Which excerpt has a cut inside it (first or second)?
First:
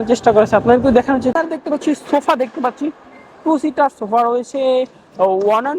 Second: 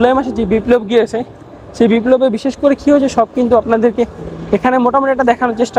first